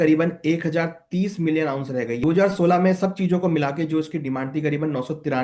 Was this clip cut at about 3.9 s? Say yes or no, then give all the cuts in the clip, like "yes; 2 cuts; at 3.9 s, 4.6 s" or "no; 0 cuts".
no; 1 cut; at 2.2 s